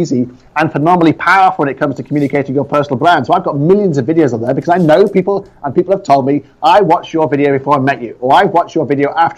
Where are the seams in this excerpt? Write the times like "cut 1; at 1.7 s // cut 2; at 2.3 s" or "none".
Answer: none